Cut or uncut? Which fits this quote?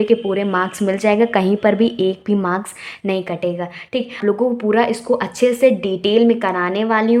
cut